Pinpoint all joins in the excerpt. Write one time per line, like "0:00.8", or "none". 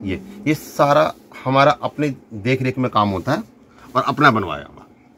none